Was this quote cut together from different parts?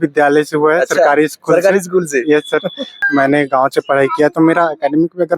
yes; 1 cut; at 3.0 s

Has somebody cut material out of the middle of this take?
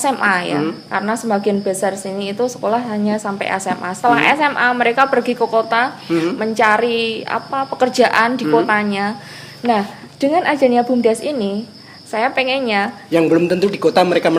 no; 0 cuts

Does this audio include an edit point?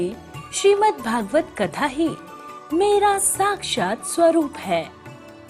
no; 0 cuts

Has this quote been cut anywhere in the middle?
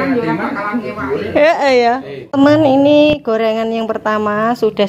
yes; 1 cut; at 2.2 s

